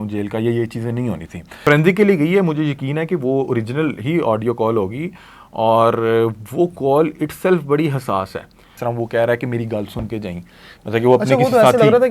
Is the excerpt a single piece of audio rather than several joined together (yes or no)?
no